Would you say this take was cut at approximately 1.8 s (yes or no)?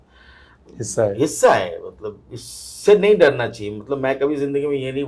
no